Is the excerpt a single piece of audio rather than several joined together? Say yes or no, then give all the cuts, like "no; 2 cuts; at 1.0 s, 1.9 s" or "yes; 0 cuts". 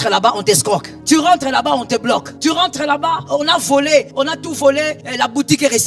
no; 5 cuts; at 0.9 s, 2.3 s, 3.2 s, 4.1 s, 5.0 s